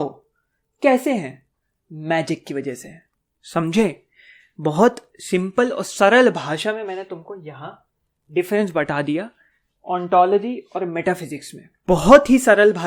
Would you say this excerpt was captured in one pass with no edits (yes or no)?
yes